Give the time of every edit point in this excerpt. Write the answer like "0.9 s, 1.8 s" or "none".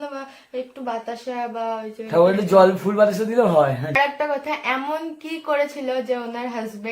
3.9 s